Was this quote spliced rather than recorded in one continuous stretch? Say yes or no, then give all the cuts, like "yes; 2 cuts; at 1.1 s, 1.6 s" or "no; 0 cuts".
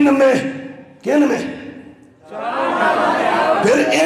no; 0 cuts